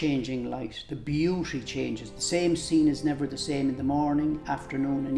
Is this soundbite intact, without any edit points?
yes; 0 cuts

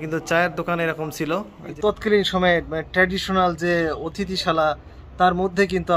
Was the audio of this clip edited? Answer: yes; 1 cut; at 1.7 s

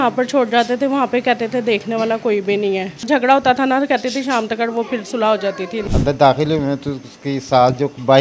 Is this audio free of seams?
no; 2 cuts; at 3.0 s, 5.9 s

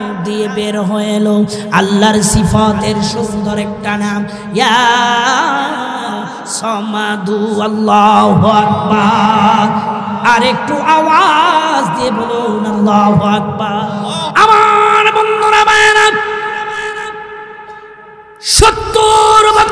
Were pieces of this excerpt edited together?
yes; 1 cut; at 14.2 s

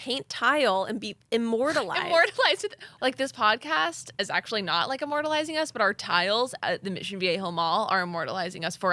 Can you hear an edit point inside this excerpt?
yes; 2 cuts; at 2.8 s, 4.2 s

